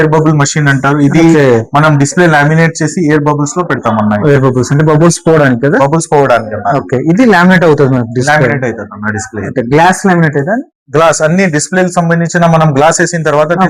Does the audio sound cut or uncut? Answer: uncut